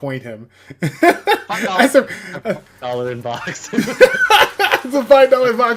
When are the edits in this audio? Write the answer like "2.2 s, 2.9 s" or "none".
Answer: 2.7 s